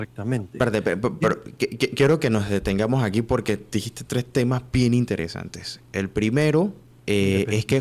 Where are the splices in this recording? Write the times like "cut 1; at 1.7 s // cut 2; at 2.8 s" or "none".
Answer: cut 1; at 6.9 s